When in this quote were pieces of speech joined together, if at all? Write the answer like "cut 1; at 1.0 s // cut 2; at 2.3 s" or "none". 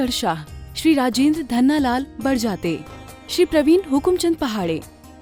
none